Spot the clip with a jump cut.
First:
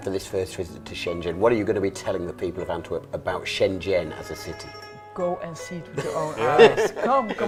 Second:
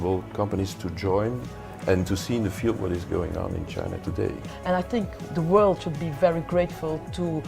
second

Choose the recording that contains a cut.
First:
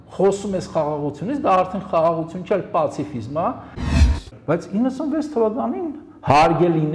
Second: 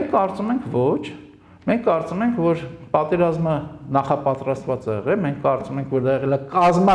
first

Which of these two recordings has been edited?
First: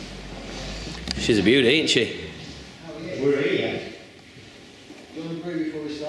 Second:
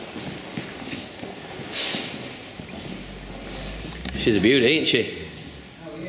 first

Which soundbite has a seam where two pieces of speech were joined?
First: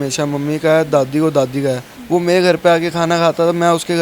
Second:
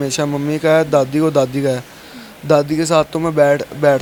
first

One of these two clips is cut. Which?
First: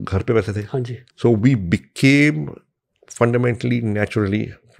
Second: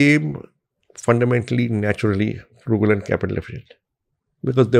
first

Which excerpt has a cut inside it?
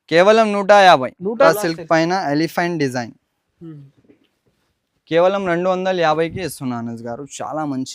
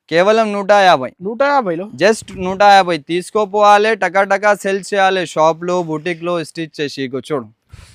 first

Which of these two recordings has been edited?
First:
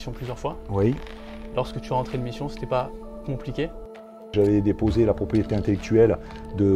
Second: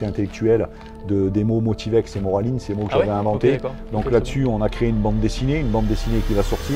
first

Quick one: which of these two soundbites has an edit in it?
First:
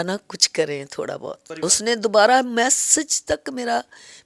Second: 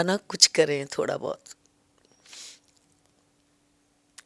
first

